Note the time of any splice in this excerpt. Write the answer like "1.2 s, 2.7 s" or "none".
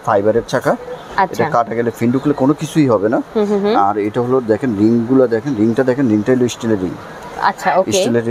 none